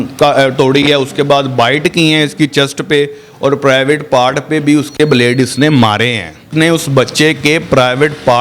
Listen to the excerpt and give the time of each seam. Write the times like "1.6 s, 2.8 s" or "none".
6.5 s